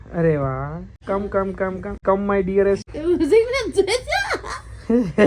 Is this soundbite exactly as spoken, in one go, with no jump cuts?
no; 3 cuts; at 0.9 s, 1.9 s, 2.9 s

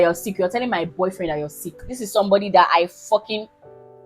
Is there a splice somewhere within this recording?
yes; 1 cut; at 2.0 s

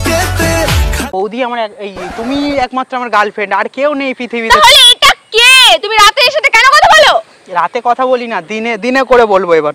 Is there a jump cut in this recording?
no; 0 cuts

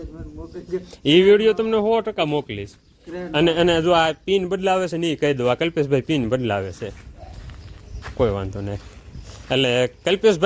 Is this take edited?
no; 0 cuts

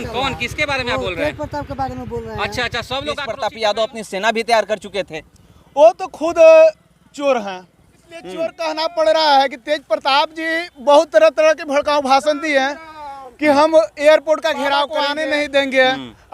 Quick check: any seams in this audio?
yes; 3 cuts; at 3.3 s, 8.6 s, 15.0 s

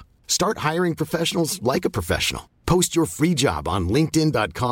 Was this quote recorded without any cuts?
yes; 0 cuts

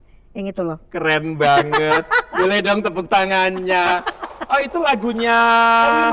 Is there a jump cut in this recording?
no; 0 cuts

